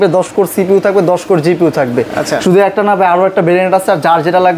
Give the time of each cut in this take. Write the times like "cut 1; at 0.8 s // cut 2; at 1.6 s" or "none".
none